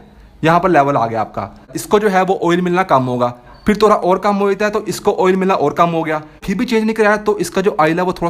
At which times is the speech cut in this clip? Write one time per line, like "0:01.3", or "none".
0:01.8
0:06.4